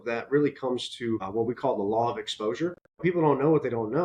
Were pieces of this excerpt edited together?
yes; 1 cut; at 3.0 s

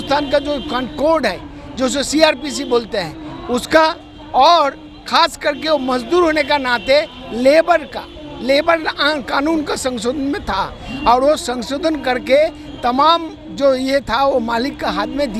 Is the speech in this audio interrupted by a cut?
no; 0 cuts

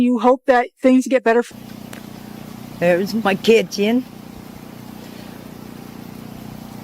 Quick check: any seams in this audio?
yes; 1 cut; at 1.5 s

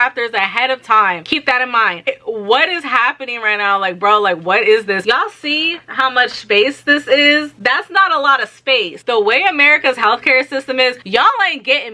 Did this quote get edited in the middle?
yes; 3 cuts; at 2.0 s, 5.0 s, 8.9 s

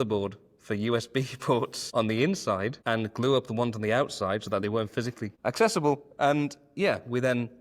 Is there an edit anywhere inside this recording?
yes; 3 cuts; at 1.8 s, 2.8 s, 5.3 s

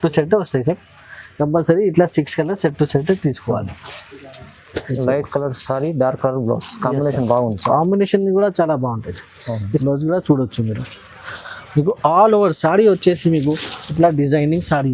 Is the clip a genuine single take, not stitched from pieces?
no; 1 cut; at 9.8 s

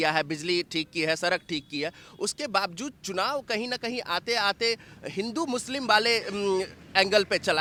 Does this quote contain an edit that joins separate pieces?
no; 0 cuts

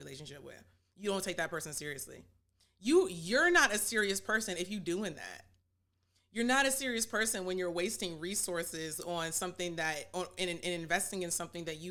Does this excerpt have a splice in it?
no; 0 cuts

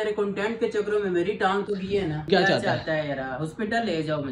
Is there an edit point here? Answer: yes; 1 cut; at 2.3 s

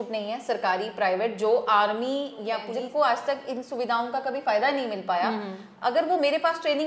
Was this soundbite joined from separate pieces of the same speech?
yes; 1 cut; at 2.7 s

